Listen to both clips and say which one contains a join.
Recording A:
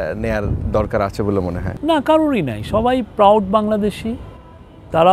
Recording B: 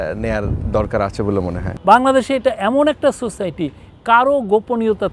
B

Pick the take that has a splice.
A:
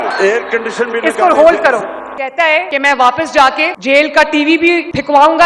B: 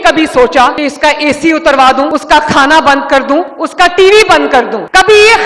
A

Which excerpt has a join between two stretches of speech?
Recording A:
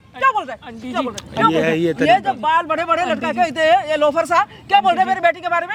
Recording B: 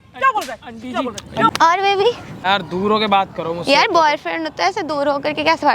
B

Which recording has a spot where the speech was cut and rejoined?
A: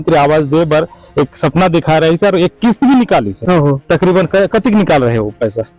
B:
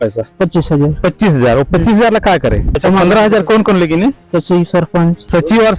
B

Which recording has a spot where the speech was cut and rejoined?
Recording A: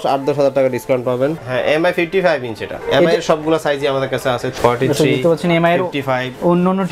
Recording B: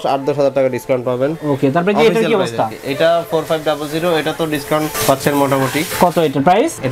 A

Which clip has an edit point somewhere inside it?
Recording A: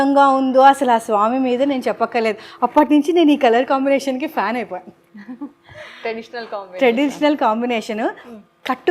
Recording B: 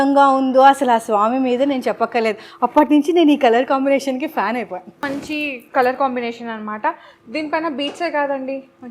B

